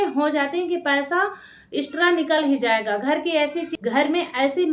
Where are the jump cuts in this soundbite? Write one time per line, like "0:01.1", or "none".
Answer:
0:03.7